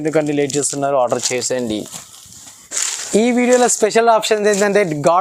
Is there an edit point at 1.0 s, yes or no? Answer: no